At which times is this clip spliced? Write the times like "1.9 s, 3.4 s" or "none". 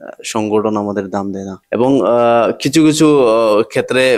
1.5 s